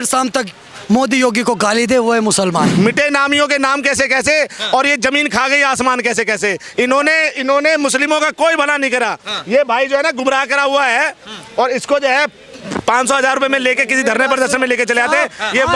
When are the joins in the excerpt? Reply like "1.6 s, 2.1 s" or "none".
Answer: 2.7 s